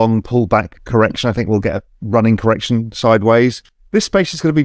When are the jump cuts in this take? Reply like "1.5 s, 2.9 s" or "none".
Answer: 3.7 s